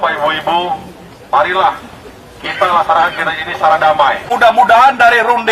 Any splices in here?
yes; 1 cut; at 4.2 s

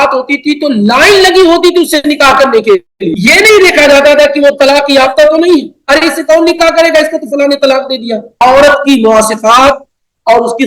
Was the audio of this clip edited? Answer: yes; 2 cuts; at 3.0 s, 8.4 s

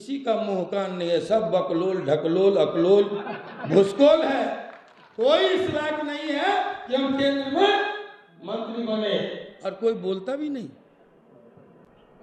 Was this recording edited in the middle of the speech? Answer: no; 0 cuts

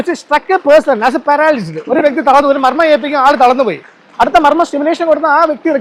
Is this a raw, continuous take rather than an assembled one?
yes; 0 cuts

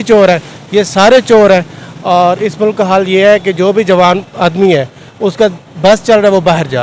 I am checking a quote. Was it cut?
no; 0 cuts

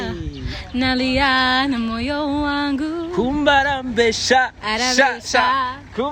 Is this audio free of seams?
yes; 0 cuts

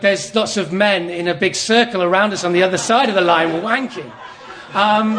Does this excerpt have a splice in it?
no; 0 cuts

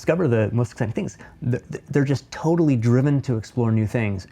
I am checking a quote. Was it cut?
no; 0 cuts

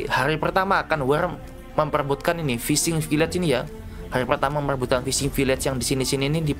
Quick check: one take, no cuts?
yes; 0 cuts

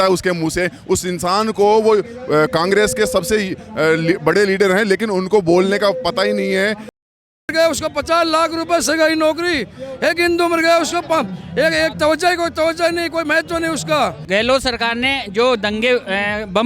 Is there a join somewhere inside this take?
yes; 2 cuts; at 6.9 s, 14.2 s

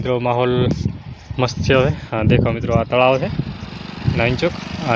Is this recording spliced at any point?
no; 0 cuts

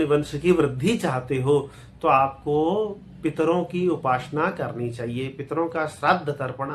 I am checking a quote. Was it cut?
no; 0 cuts

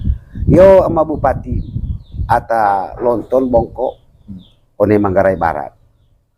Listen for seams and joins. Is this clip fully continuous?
yes; 0 cuts

